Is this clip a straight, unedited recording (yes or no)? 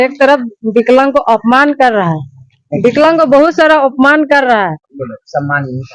yes